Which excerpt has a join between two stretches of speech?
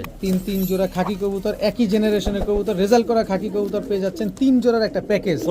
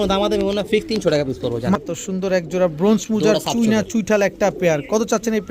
second; 1 cut; at 1.8 s

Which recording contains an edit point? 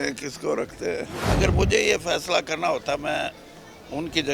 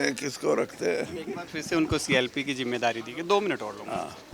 first; 1 cut; at 1.2 s

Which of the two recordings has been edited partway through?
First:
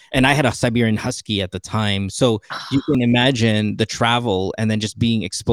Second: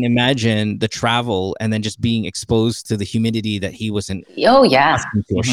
second; 1 cut; at 4.2 s

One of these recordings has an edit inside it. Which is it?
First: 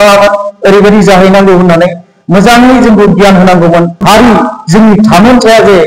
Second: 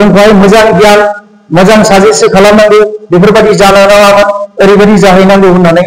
first; 1 cut; at 4.0 s

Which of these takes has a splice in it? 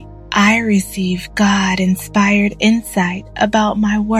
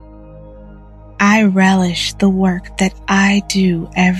second; 1 cut; at 1.2 s

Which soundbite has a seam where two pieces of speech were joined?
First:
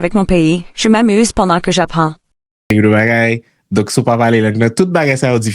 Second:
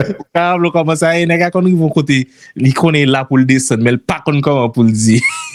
first; 1 cut; at 2.7 s

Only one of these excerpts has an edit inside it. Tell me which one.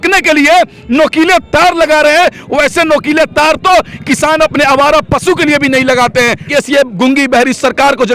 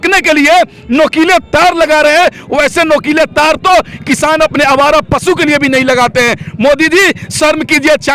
first; 1 cut; at 6.5 s

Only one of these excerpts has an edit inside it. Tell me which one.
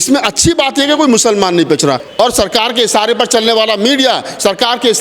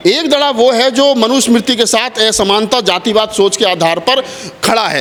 first; 1 cut; at 2.1 s

